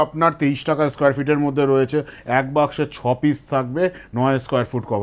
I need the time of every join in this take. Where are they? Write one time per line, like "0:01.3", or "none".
none